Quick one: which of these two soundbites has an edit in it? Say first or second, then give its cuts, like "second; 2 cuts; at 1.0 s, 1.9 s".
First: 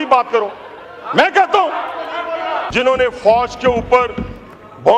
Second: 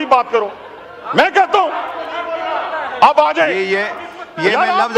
first; 1 cut; at 2.7 s